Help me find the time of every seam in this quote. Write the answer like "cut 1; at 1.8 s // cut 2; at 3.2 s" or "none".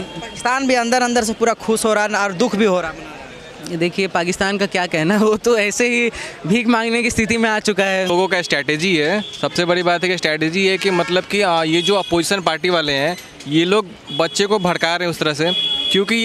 cut 1; at 8.1 s